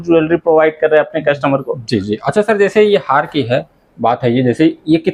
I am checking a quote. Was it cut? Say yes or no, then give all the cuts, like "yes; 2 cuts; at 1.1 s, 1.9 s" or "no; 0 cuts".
no; 0 cuts